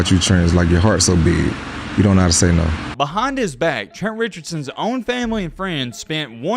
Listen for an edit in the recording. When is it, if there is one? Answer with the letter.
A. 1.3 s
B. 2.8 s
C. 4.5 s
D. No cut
B